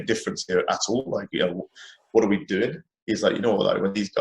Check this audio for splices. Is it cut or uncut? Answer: cut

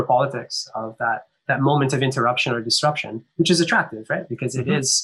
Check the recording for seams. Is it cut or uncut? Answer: uncut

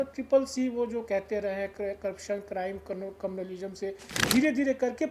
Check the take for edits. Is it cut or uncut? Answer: cut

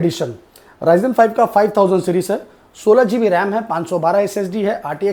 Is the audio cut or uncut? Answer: uncut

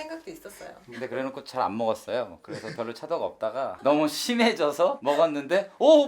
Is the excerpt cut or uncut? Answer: cut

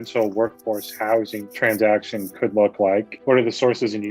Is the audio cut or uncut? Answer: cut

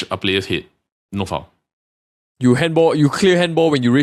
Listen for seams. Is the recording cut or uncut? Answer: uncut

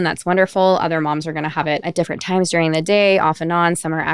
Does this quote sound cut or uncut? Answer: cut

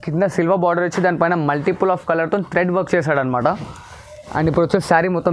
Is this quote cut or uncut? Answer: uncut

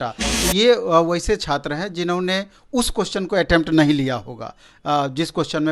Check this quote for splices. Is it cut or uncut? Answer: uncut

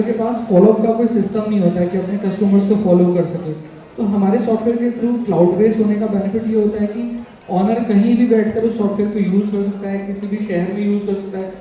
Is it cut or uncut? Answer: uncut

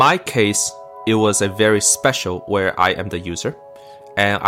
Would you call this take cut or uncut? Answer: uncut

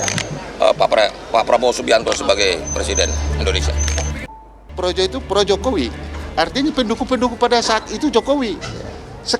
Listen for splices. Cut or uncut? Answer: cut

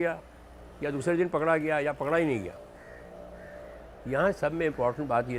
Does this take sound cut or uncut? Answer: uncut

